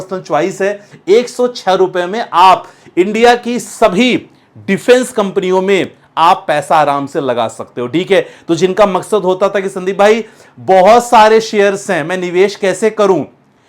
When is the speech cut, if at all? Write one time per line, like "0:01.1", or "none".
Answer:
0:00.9